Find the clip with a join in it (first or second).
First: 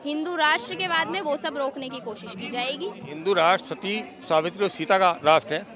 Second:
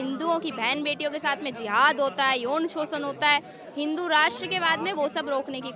first